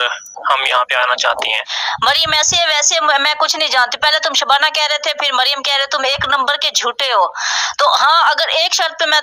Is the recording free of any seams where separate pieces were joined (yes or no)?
no